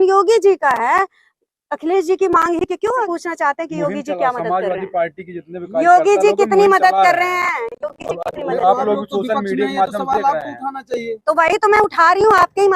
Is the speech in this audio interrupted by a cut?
yes; 1 cut; at 3.1 s

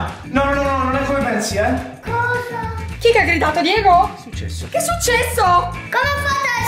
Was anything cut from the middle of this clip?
yes; 2 cuts; at 2.9 s, 5.8 s

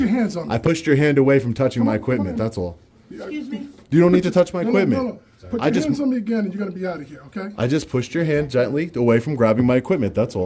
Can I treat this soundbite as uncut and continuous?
yes; 0 cuts

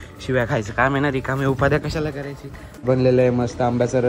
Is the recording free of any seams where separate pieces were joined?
no; 1 cut; at 2.8 s

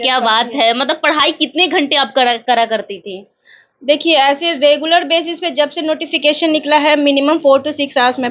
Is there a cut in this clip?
no; 0 cuts

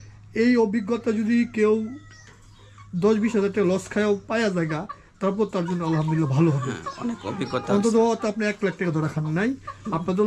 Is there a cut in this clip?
no; 0 cuts

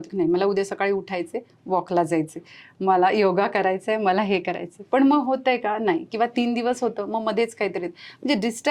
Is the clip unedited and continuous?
yes; 0 cuts

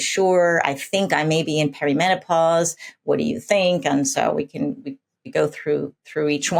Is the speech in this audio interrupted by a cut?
no; 0 cuts

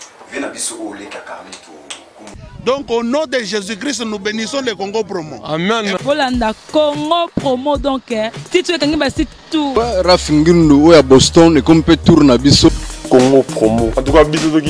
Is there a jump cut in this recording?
yes; 3 cuts; at 2.3 s, 9.7 s, 12.9 s

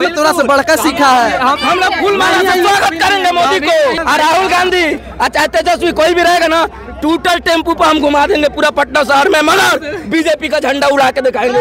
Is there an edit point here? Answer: yes; 2 cuts; at 1.6 s, 4.0 s

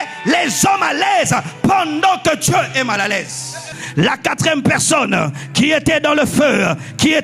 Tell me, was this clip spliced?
yes; 1 cut; at 3.7 s

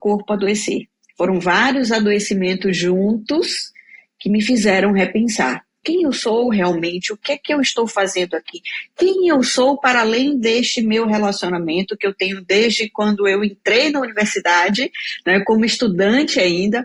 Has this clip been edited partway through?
yes; 1 cut; at 5.8 s

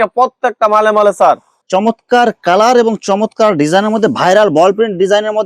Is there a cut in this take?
yes; 1 cut; at 1.5 s

